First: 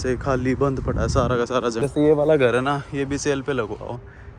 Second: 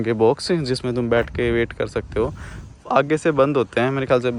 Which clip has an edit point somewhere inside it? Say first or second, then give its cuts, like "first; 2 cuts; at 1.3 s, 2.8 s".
first; 1 cut; at 1.8 s